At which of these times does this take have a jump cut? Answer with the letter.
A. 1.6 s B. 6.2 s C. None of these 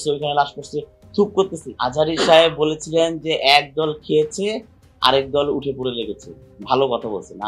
A